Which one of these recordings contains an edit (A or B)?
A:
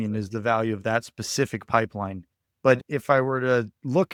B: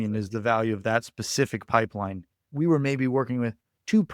B